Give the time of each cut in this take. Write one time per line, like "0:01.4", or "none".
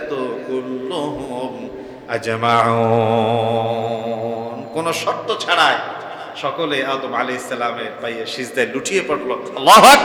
none